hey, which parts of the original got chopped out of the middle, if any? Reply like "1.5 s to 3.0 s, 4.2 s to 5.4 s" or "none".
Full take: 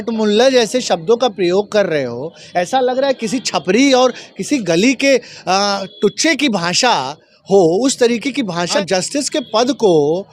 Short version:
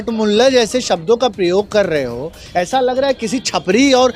none